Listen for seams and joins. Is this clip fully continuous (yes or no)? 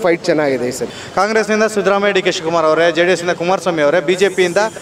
no